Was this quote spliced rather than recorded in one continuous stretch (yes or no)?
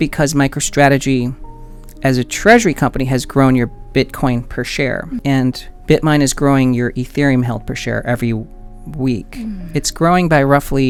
no